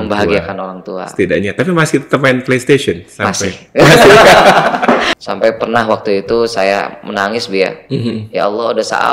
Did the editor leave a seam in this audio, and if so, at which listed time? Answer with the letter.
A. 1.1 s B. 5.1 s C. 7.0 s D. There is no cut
B